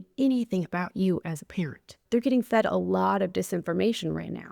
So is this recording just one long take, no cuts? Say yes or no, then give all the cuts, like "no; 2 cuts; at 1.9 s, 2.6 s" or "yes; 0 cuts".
no; 1 cut; at 2.0 s